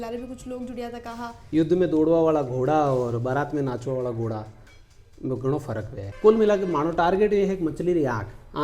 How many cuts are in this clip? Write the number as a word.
two